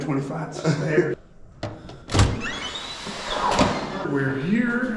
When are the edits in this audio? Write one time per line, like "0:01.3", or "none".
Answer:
0:04.0